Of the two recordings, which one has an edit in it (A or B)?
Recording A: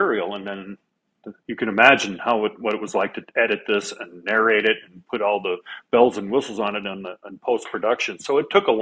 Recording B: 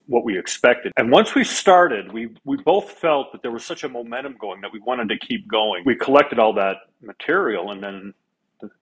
B